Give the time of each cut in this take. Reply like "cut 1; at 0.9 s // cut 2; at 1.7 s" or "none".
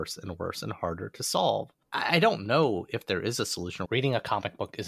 cut 1; at 1.8 s // cut 2; at 3.8 s